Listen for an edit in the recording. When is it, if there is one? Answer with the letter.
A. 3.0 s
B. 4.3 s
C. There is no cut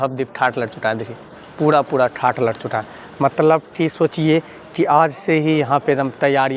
C